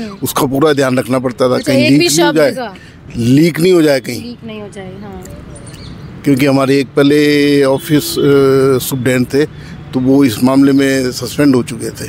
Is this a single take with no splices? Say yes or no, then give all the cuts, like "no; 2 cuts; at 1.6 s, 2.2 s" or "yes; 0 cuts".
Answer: yes; 0 cuts